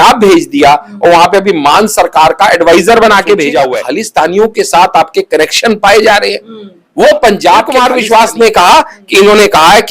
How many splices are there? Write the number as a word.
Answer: two